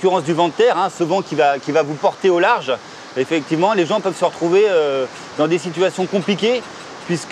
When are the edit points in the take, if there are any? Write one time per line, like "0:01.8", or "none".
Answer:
none

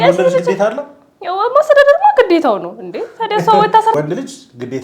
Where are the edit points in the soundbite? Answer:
0:03.9

